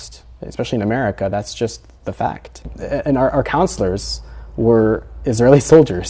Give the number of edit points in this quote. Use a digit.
1